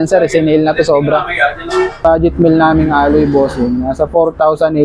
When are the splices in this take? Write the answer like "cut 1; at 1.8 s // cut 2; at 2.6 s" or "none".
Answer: cut 1; at 1.8 s